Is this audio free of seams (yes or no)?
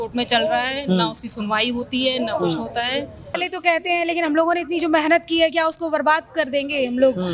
no